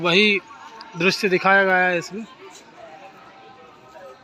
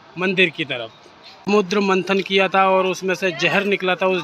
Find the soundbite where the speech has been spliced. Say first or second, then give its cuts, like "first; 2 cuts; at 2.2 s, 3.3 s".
second; 1 cut; at 1.5 s